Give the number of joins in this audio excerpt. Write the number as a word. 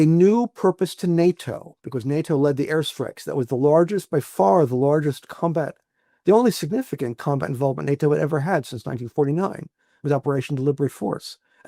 zero